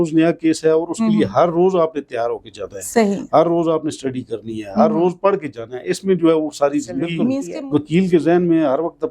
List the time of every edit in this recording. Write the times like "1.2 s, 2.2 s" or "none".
7.5 s

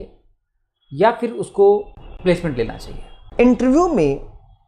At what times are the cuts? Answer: 2.0 s, 3.2 s

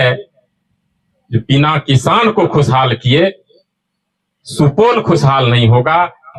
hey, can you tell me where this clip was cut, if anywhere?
none

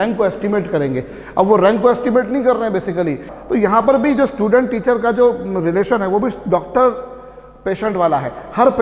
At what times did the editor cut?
3.3 s

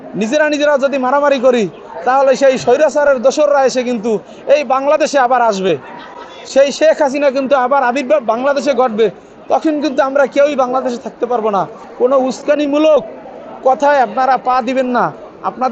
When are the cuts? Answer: none

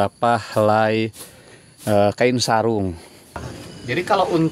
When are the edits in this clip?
3.3 s

